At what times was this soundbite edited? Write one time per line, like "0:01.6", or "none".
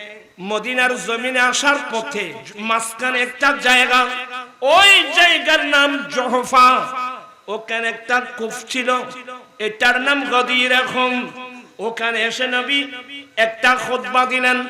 0:02.4